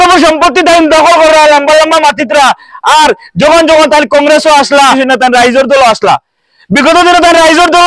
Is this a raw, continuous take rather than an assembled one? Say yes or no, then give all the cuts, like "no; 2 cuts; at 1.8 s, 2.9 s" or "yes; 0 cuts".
no; 1 cut; at 5.0 s